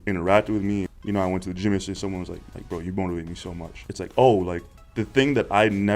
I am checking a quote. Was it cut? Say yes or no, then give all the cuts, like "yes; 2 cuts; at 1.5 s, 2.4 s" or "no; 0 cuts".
yes; 3 cuts; at 0.9 s, 2.4 s, 3.8 s